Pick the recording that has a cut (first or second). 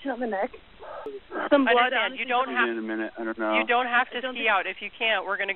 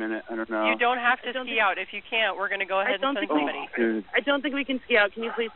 first